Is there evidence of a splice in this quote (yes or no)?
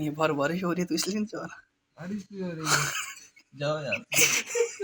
no